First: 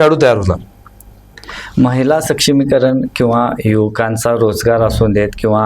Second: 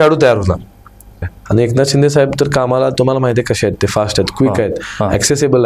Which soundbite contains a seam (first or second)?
second